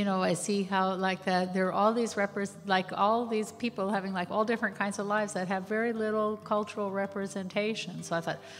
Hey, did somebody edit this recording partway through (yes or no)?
no